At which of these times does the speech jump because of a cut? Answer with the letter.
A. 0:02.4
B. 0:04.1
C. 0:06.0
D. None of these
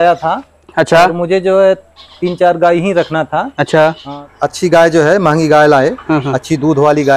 B